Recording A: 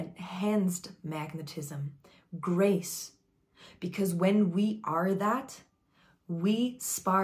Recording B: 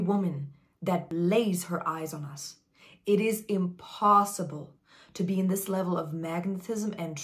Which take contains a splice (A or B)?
B